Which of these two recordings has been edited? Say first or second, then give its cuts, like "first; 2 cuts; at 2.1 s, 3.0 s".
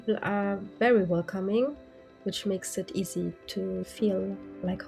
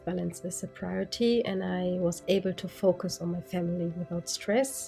first; 1 cut; at 3.8 s